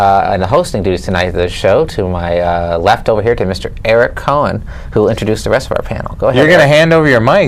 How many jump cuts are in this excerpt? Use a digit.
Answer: 0